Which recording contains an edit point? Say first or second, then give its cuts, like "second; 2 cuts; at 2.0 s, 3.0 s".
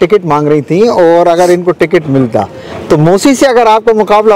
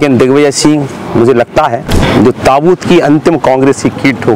second; 1 cut; at 1.9 s